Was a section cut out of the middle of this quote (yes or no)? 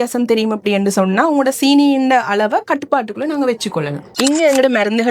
yes